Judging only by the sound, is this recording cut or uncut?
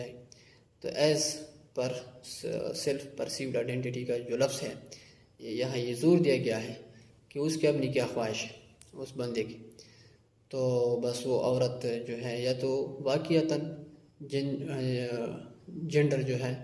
uncut